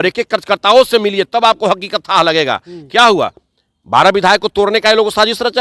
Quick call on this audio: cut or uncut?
uncut